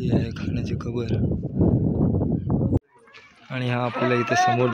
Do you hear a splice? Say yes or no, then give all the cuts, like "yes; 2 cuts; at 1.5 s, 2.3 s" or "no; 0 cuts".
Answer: yes; 1 cut; at 2.8 s